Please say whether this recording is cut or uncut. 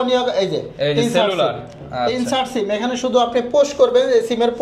uncut